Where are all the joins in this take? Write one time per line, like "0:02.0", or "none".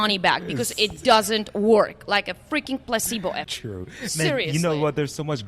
0:03.6